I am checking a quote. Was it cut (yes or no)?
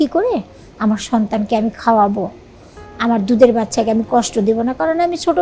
no